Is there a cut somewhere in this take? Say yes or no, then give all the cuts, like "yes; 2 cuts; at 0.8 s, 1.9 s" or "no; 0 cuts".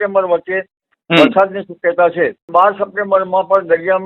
yes; 1 cut; at 2.5 s